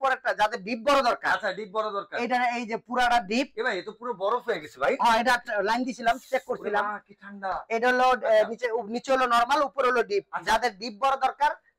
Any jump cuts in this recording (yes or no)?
no